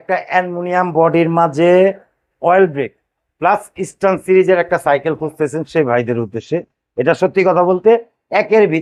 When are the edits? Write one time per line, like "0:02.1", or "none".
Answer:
none